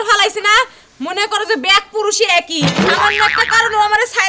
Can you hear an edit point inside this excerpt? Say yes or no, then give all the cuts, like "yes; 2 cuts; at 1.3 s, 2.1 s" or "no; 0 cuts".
no; 0 cuts